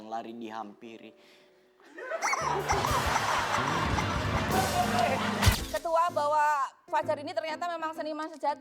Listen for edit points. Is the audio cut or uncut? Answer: cut